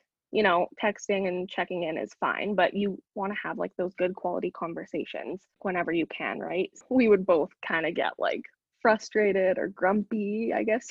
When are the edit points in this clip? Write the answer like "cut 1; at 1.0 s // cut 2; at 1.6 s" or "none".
cut 1; at 5.6 s // cut 2; at 6.7 s